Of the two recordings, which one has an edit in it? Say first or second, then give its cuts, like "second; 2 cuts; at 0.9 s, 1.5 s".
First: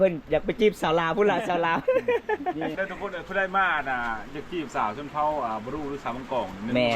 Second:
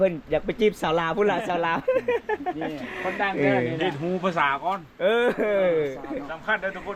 first; 1 cut; at 2.8 s